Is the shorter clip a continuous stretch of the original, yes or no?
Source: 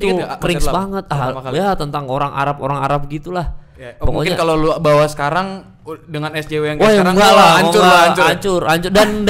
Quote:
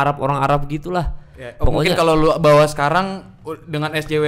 yes